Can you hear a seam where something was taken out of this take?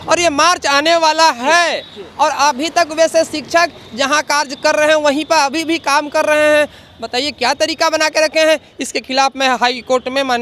no; 0 cuts

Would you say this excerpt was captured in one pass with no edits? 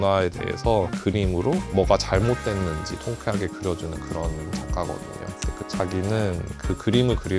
no; 1 cut; at 1.0 s

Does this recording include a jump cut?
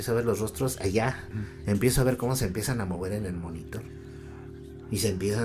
yes; 1 cut; at 1.3 s

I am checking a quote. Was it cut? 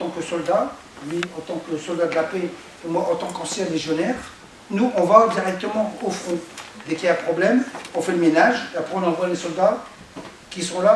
no; 0 cuts

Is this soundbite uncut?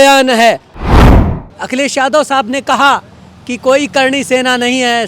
no; 1 cut; at 1.1 s

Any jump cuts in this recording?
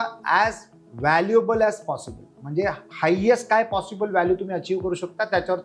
no; 0 cuts

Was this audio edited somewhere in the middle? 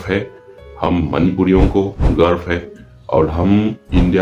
no; 0 cuts

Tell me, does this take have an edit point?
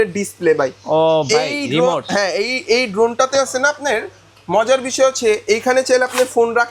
no; 0 cuts

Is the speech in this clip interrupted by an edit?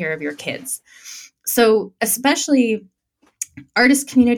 no; 0 cuts

